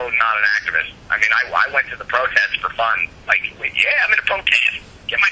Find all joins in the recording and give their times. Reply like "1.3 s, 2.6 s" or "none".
none